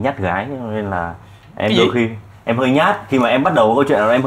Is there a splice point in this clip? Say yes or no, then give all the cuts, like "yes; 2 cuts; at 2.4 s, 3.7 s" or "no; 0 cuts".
no; 0 cuts